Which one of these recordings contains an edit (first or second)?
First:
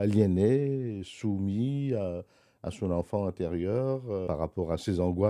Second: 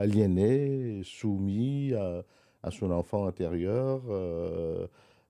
first